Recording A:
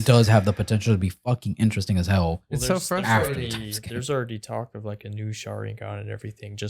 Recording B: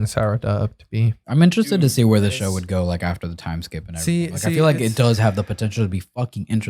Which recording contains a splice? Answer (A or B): B